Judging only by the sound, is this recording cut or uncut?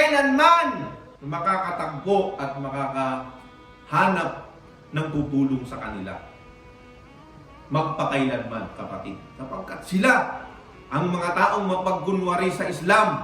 uncut